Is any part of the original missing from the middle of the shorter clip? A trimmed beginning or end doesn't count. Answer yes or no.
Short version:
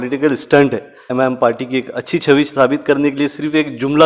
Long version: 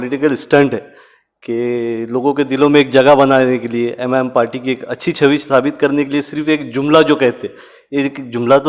yes